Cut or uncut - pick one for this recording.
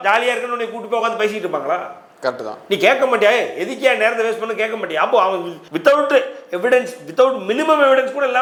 uncut